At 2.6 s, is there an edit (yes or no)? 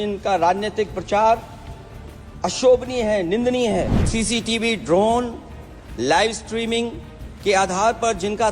no